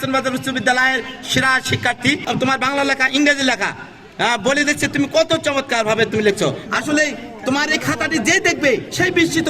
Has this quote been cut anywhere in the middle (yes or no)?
yes